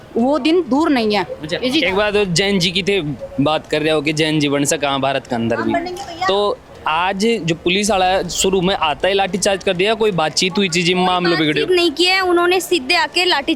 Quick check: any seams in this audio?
no; 0 cuts

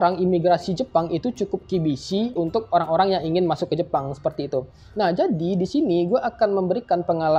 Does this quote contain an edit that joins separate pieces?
no; 0 cuts

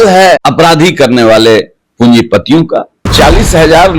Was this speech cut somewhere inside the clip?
yes; 1 cut; at 3.1 s

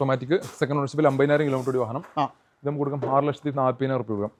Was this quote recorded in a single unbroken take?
yes; 0 cuts

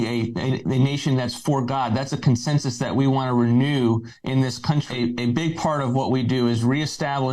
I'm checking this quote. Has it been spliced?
yes; 1 cut; at 4.9 s

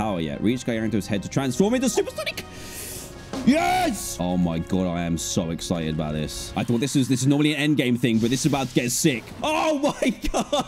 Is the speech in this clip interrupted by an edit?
yes; 3 cuts; at 4.1 s, 6.5 s, 9.3 s

